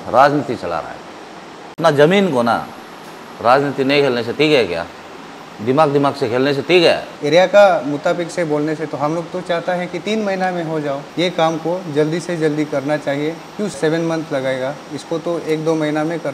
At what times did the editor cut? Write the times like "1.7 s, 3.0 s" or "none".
1.8 s, 7.1 s, 11.0 s, 13.8 s

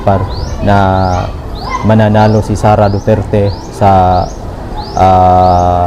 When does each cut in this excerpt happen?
none

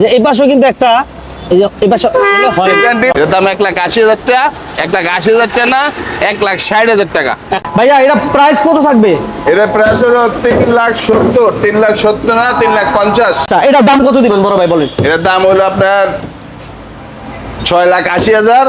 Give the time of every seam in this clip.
3.1 s, 7.5 s, 13.5 s

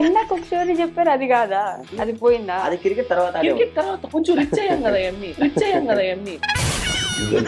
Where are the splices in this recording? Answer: 5.4 s

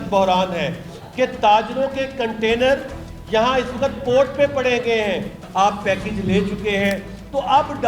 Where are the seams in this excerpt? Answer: 5.4 s

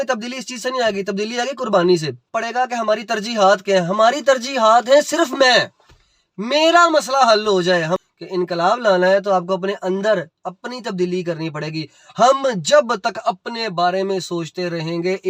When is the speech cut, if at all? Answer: 2.2 s, 8.0 s

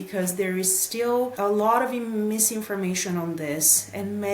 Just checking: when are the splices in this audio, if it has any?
1.3 s

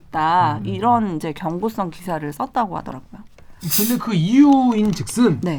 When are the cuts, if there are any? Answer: none

